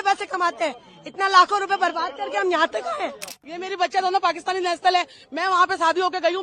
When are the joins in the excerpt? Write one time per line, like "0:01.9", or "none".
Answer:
0:03.4